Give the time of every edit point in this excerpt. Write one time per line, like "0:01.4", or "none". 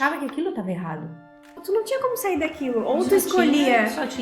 0:01.6